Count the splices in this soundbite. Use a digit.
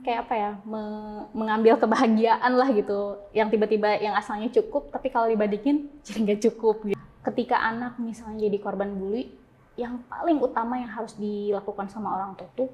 1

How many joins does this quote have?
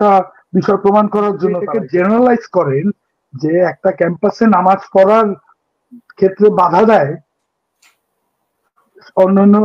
1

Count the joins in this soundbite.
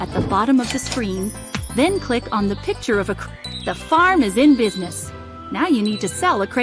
1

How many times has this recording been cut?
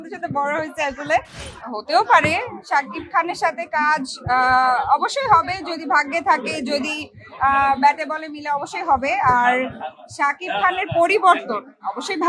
1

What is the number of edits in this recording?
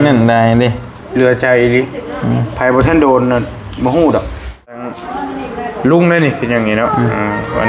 1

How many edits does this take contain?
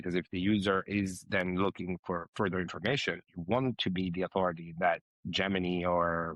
1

